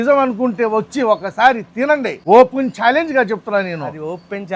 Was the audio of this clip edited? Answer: yes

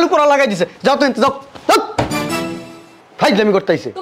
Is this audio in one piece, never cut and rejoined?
yes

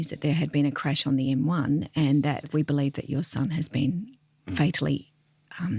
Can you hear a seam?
yes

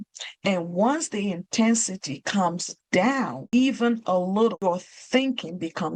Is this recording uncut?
no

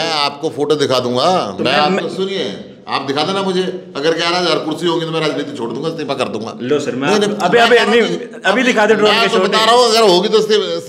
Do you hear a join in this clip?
no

